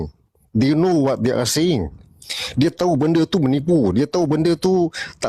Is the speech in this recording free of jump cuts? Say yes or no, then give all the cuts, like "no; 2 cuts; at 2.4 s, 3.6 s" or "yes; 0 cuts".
yes; 0 cuts